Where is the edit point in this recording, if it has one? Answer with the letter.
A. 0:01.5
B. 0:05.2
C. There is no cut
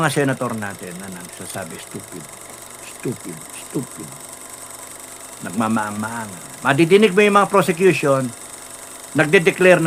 C